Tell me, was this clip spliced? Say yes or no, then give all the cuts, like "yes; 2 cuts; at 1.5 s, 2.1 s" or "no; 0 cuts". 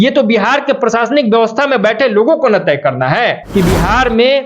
yes; 1 cut; at 3.4 s